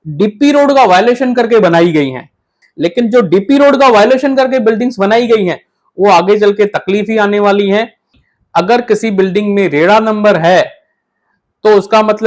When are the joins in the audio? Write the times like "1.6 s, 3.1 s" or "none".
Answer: 2.6 s, 8.2 s